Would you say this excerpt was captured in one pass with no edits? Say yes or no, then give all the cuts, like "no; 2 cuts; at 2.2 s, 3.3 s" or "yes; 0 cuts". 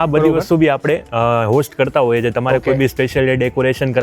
yes; 0 cuts